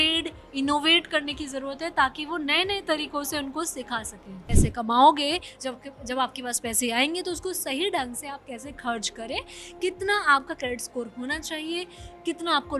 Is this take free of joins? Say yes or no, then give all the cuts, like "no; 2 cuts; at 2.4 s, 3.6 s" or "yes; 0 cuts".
no; 1 cut; at 4.5 s